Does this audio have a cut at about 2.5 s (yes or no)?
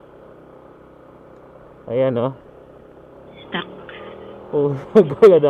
no